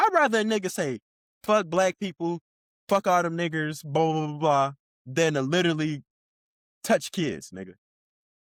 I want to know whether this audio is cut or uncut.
uncut